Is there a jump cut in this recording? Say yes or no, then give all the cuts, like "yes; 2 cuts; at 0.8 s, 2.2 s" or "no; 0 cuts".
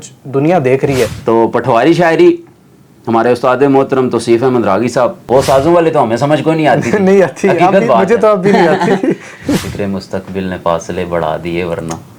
yes; 3 cuts; at 1.2 s, 5.2 s, 9.6 s